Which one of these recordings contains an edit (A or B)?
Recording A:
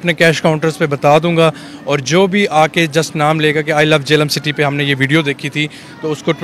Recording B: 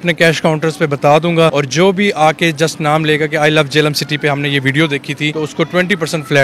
B